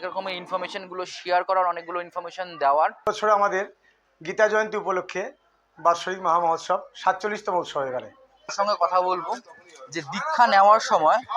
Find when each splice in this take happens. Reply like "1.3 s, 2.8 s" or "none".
3.1 s, 8.5 s

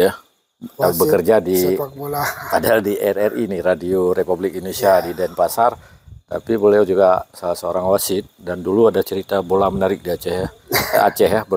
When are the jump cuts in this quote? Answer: none

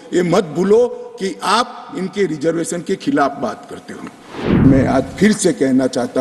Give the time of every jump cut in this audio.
4.5 s

